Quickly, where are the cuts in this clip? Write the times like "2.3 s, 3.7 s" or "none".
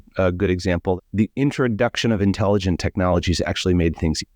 1.0 s